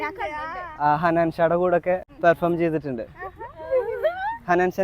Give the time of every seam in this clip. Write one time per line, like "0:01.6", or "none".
0:02.1